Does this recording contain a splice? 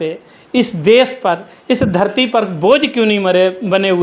no; 0 cuts

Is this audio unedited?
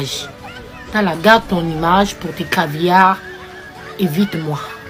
yes; 0 cuts

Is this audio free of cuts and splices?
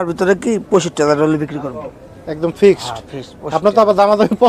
yes; 0 cuts

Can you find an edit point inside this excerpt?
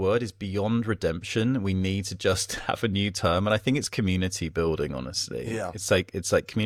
no; 0 cuts

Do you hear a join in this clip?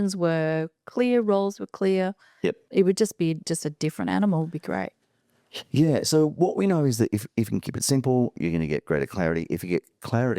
no; 0 cuts

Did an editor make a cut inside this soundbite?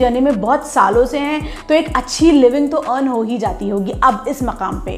no; 0 cuts

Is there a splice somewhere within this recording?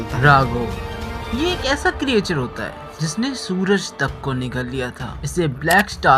no; 0 cuts

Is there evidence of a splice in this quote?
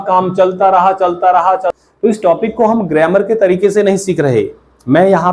yes; 1 cut; at 1.7 s

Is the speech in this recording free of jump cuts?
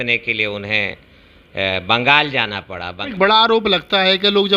no; 1 cut; at 3.1 s

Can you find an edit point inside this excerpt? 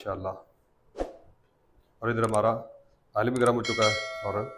no; 0 cuts

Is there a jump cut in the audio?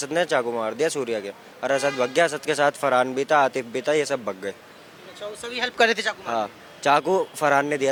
no; 0 cuts

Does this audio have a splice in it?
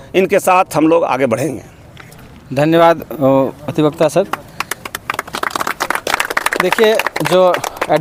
no; 0 cuts

